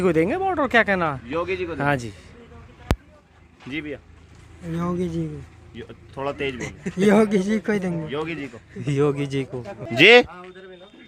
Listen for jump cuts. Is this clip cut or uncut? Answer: uncut